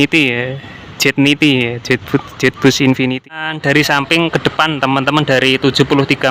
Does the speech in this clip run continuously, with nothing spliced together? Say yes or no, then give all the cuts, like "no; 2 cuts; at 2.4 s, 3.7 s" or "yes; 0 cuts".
no; 1 cut; at 3.2 s